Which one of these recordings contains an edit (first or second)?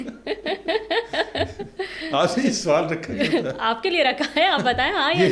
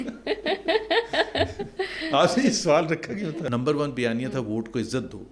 second